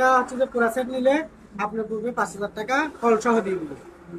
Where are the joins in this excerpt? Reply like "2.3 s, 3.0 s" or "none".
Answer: none